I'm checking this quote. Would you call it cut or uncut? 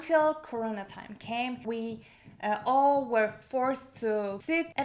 cut